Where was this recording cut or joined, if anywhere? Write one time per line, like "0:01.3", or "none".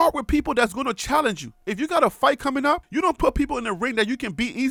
none